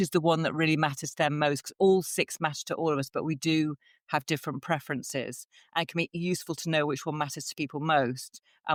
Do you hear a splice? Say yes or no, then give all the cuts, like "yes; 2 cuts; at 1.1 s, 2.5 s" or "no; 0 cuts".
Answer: no; 0 cuts